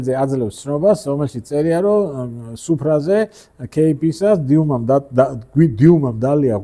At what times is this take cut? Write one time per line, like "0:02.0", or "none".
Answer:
none